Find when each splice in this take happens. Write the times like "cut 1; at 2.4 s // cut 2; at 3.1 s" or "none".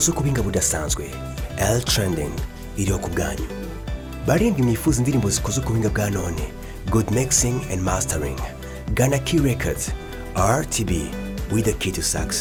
none